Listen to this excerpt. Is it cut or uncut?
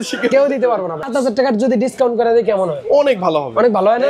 cut